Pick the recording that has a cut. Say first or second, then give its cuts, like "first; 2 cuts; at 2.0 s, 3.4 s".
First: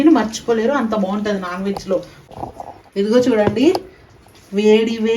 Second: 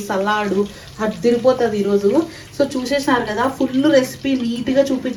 first; 1 cut; at 2.4 s